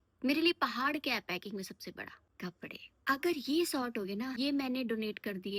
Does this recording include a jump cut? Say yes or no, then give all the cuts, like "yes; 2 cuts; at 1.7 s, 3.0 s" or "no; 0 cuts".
no; 0 cuts